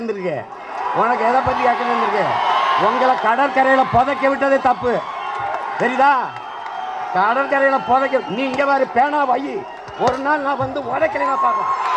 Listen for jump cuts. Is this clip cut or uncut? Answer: uncut